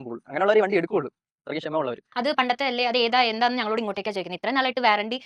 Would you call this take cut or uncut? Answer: cut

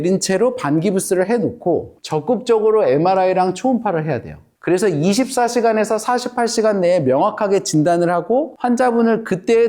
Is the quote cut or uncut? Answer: uncut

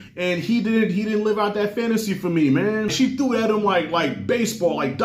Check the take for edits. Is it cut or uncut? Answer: cut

